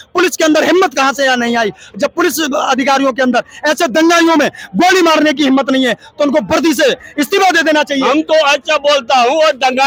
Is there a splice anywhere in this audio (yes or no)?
no